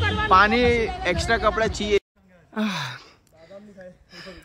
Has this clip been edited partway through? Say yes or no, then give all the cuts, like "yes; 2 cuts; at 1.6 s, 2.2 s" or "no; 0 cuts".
yes; 1 cut; at 2.0 s